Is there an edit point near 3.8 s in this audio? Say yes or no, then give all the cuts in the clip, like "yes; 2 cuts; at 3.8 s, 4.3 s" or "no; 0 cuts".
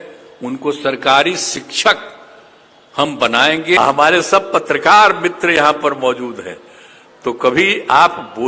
yes; 1 cut; at 3.8 s